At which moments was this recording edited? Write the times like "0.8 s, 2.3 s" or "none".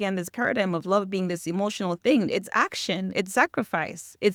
none